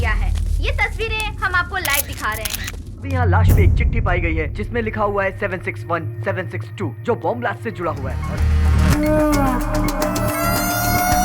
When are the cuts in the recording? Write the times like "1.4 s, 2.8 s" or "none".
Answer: 3.1 s, 8.1 s